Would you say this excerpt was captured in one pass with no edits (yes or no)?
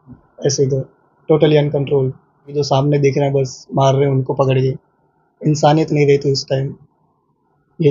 no